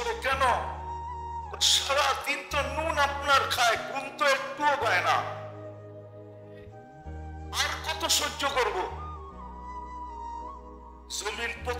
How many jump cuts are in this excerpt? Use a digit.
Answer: 2